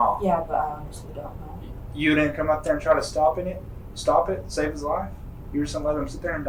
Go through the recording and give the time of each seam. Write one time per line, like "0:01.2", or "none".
none